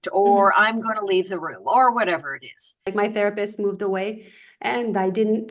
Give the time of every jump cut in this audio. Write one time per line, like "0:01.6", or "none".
0:02.9